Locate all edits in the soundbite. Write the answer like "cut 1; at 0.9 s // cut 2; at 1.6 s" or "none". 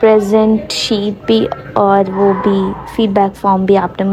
none